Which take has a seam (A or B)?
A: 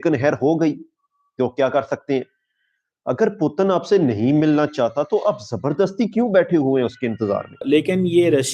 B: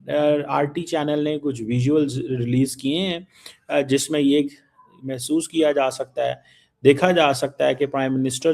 A